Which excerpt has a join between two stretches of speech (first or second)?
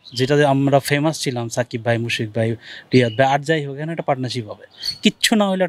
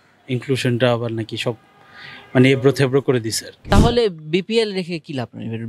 second